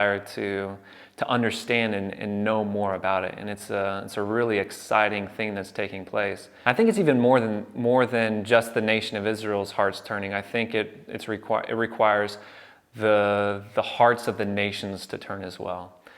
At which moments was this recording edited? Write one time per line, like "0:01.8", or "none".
0:06.5